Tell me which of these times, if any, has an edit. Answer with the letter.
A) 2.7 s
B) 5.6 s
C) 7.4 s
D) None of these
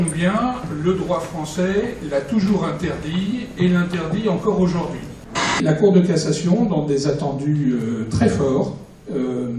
B